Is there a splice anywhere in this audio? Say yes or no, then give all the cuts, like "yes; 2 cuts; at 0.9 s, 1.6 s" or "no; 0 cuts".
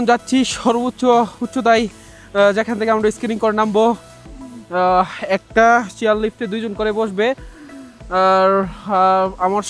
no; 0 cuts